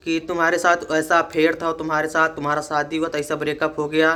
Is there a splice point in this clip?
no; 0 cuts

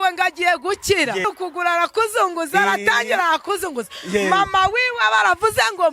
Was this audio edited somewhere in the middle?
yes; 1 cut; at 1.2 s

